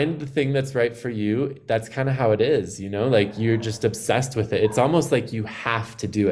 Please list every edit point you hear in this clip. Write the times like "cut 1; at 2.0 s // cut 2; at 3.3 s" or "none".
none